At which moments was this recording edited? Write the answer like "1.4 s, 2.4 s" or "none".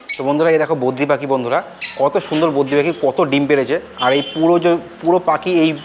none